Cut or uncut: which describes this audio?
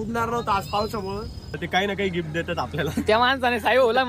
cut